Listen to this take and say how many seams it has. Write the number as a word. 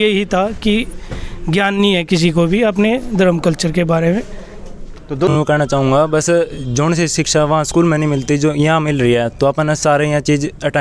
one